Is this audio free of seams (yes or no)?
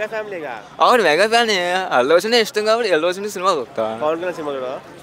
yes